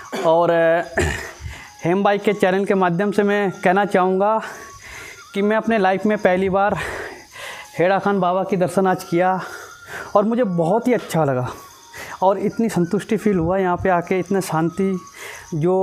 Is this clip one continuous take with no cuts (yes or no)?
yes